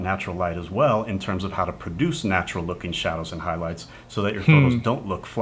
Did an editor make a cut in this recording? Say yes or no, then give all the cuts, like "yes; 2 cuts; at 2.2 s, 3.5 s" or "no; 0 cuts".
no; 0 cuts